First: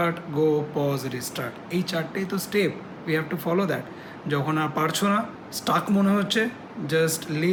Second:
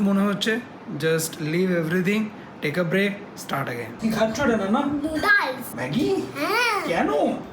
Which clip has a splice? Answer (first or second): second